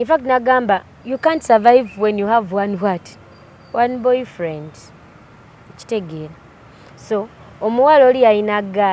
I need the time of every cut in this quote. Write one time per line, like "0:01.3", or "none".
none